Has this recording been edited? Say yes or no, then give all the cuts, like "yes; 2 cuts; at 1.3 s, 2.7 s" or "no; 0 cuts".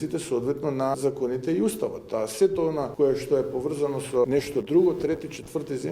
yes; 3 cuts; at 0.9 s, 2.9 s, 4.3 s